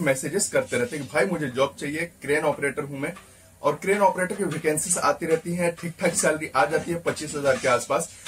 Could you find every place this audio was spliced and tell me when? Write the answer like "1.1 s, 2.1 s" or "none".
none